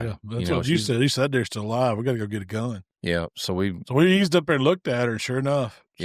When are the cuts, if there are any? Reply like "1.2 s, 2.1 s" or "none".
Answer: none